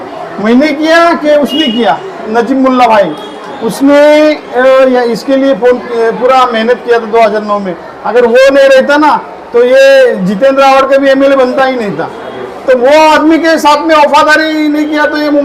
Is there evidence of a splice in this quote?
yes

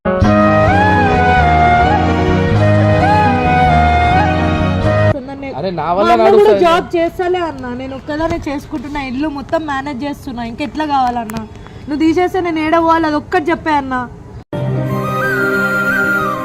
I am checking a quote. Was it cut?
yes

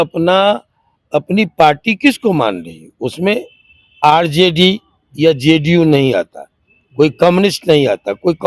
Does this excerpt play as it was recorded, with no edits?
yes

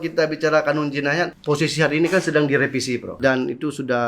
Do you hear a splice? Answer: yes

